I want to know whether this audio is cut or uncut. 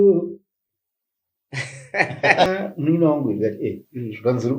cut